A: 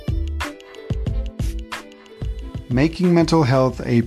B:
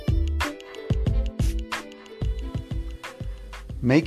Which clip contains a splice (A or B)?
A